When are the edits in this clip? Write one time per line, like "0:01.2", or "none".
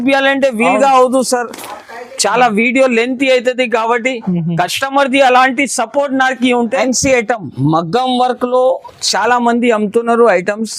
0:06.8